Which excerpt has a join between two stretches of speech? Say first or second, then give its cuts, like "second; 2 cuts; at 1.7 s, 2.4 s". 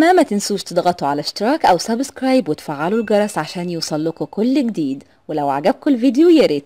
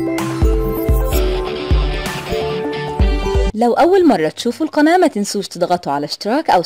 second; 1 cut; at 3.5 s